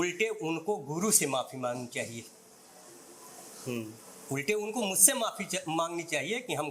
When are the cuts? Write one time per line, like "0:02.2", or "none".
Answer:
none